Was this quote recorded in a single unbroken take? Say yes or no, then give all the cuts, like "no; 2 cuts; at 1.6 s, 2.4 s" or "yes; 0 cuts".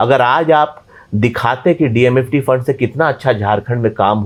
yes; 0 cuts